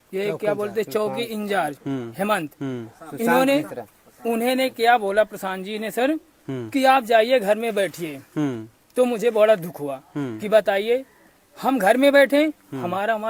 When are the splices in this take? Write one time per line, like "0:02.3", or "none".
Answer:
none